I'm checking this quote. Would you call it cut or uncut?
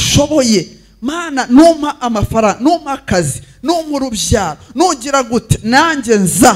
uncut